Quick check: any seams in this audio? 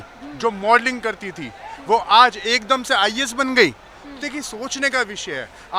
no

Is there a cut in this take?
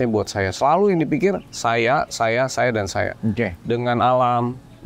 no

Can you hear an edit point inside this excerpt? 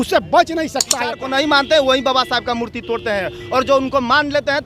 yes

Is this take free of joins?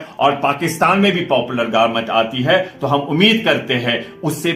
yes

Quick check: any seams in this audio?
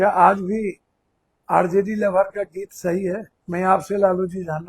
yes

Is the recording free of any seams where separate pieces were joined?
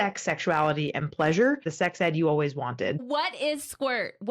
no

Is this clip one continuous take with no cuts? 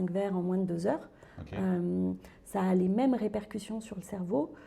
yes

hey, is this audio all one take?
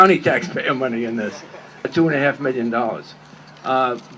no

